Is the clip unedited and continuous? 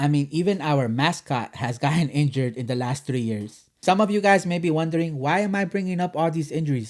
no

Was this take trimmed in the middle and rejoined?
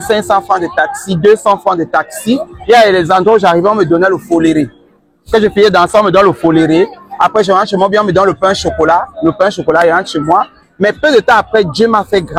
no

